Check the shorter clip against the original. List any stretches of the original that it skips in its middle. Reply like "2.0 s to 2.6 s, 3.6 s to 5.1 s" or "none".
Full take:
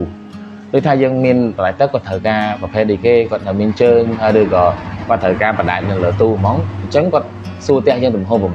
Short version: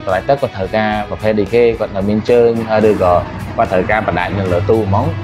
none